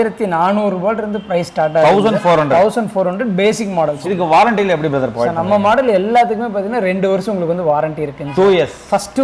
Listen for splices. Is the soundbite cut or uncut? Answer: uncut